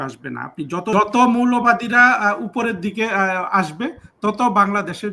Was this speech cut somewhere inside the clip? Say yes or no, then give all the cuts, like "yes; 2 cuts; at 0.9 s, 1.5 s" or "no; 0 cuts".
yes; 1 cut; at 0.9 s